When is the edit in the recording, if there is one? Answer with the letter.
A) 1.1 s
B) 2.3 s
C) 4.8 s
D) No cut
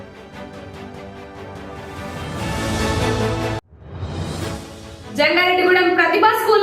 C